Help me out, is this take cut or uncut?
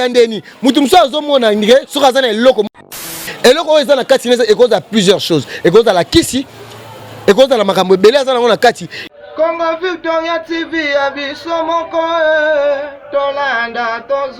cut